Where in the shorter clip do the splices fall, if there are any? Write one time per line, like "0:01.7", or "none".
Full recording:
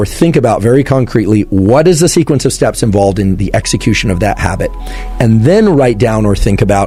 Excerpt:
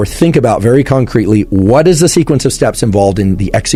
none

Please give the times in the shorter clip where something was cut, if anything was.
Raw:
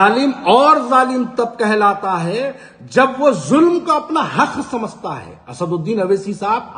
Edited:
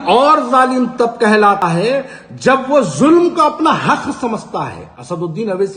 0:01.6

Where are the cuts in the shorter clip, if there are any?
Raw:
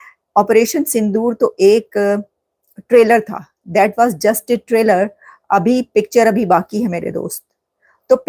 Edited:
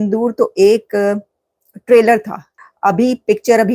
0:02.5

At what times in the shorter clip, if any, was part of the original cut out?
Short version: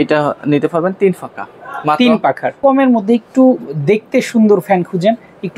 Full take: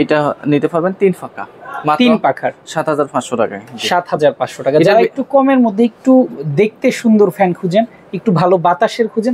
0:02.5

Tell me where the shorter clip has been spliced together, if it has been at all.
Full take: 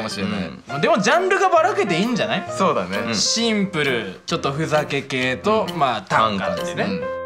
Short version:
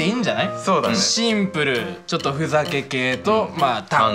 0:01.0

